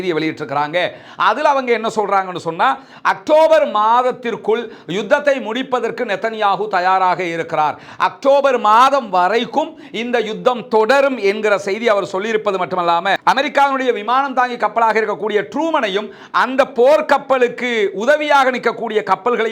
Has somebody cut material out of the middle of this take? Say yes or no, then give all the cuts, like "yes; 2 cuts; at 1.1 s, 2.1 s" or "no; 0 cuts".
yes; 1 cut; at 13.2 s